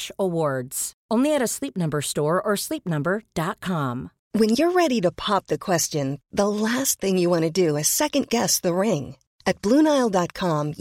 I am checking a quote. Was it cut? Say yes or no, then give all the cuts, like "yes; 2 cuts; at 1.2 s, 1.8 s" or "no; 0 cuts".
no; 0 cuts